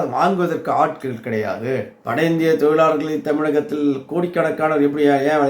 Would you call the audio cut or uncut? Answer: cut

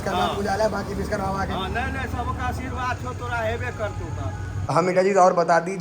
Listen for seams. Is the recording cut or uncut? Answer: cut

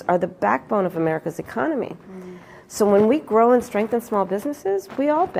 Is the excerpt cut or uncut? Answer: uncut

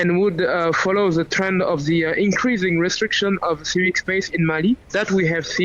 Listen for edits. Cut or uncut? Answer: uncut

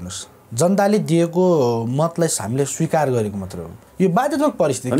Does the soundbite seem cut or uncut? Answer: uncut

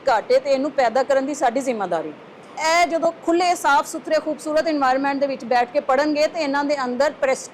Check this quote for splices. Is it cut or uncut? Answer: cut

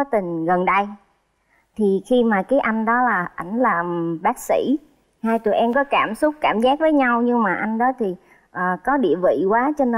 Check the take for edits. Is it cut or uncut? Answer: uncut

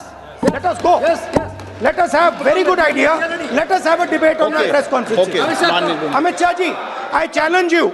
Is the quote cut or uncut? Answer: uncut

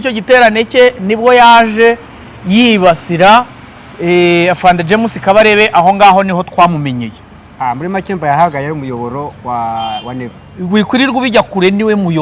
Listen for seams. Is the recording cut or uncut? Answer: uncut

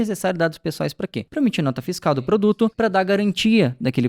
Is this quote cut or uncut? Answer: cut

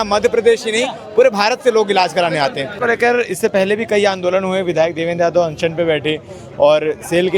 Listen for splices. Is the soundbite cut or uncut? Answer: cut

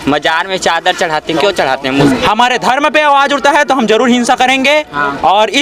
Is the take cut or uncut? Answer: cut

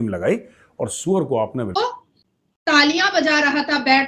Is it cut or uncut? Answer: cut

